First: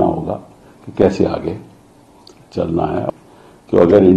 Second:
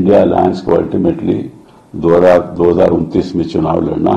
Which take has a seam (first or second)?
first